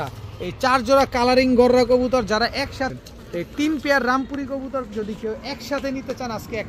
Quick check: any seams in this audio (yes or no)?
yes